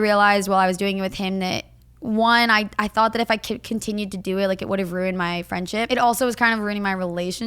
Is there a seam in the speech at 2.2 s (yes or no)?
no